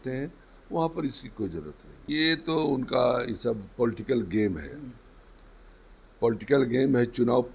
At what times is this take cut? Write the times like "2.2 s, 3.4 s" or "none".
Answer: 1.9 s